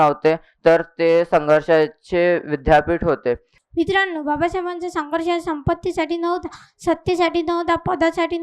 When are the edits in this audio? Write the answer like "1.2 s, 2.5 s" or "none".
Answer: 3.6 s